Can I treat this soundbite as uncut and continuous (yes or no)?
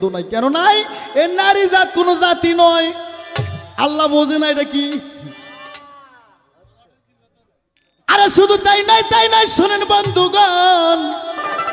yes